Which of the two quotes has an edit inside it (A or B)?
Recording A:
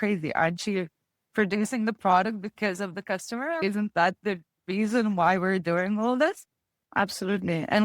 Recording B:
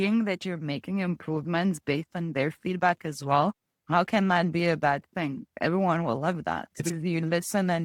A